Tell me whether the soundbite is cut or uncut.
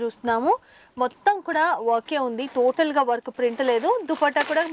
uncut